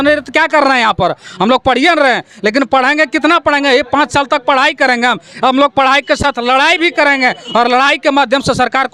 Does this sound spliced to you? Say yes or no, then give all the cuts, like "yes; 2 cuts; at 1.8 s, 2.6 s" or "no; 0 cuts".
no; 0 cuts